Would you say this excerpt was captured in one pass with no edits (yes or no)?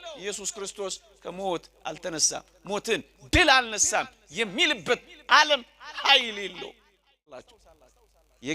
no